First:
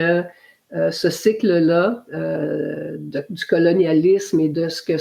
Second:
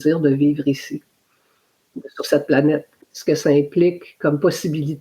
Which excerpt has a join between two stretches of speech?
second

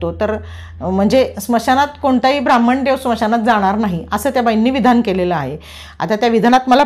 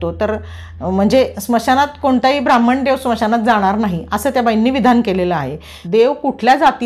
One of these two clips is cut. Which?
second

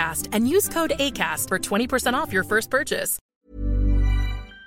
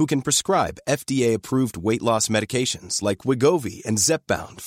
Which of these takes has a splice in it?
first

